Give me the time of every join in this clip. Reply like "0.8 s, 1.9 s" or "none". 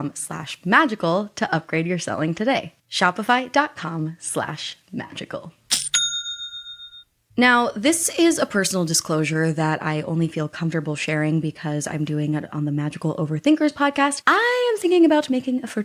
none